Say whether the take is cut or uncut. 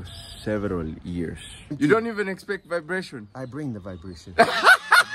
cut